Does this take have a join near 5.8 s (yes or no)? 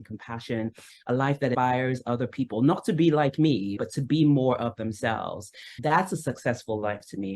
yes